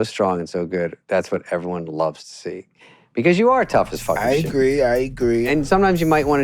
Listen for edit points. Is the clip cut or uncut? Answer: cut